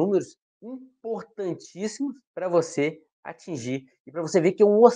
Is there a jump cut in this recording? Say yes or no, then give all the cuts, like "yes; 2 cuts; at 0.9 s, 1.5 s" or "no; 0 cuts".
no; 0 cuts